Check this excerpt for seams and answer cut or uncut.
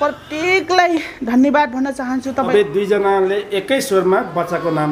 cut